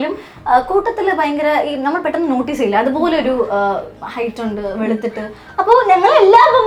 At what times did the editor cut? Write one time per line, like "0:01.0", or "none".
none

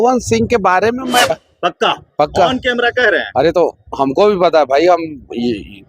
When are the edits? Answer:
0:01.5

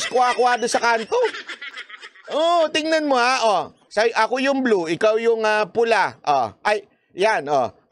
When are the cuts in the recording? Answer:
none

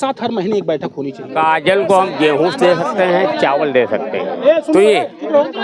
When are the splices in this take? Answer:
0:01.3

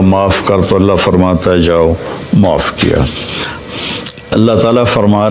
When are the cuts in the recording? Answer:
0:03.6

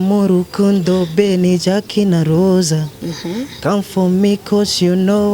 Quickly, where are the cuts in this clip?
none

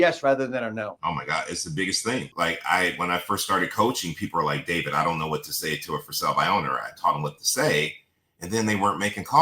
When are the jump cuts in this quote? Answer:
0:00.9
0:02.3

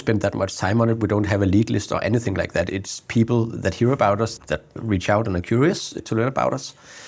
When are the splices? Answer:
none

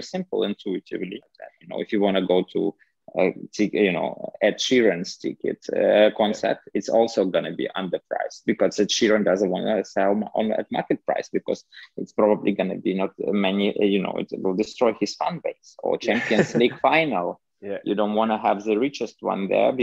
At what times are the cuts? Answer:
0:01.6

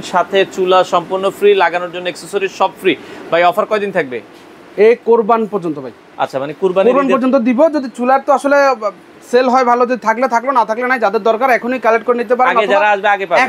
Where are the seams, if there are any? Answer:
none

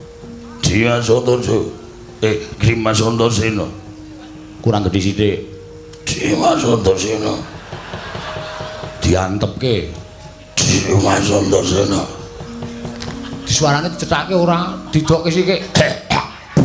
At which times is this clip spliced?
none

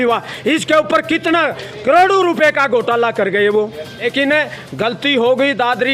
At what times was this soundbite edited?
0:04.0

